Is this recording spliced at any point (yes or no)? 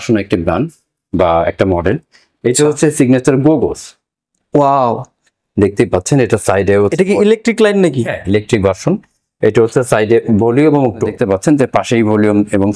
yes